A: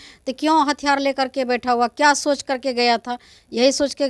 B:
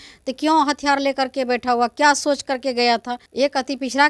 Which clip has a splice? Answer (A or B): B